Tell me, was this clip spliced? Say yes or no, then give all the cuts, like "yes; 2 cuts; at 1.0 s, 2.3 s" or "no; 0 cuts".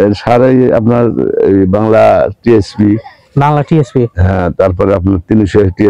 no; 0 cuts